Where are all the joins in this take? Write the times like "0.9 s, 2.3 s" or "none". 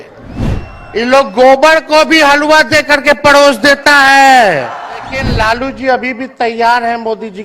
5.3 s